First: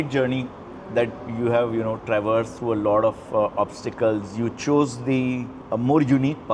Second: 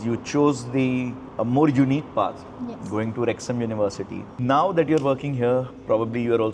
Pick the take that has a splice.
second; 1 cut; at 4.3 s

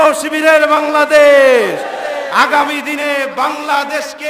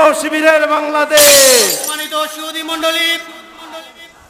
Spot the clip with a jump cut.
second; 1 cut; at 1.9 s

